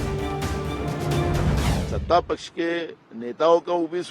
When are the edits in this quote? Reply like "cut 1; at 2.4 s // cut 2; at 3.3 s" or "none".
cut 1; at 1.8 s